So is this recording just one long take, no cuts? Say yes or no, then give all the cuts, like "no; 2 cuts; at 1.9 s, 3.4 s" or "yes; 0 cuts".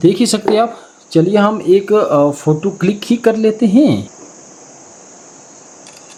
yes; 0 cuts